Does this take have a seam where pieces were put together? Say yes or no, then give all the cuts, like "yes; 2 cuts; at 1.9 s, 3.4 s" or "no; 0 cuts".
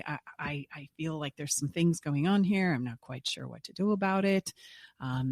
no; 0 cuts